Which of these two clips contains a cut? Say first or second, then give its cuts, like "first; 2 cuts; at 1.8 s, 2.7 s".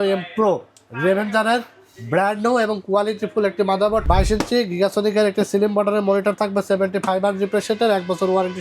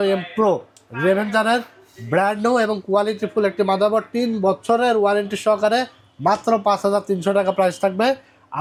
first; 1 cut; at 4.0 s